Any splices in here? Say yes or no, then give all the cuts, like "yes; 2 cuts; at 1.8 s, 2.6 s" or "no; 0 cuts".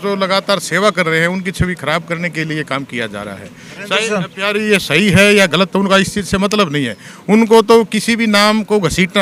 no; 0 cuts